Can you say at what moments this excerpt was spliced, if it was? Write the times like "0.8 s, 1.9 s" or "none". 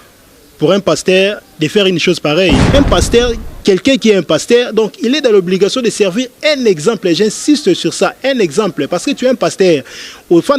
2.6 s